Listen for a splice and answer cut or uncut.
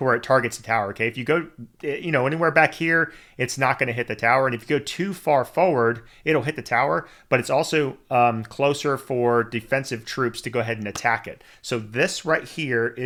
uncut